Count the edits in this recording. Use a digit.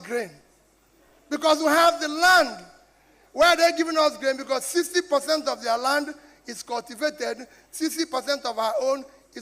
0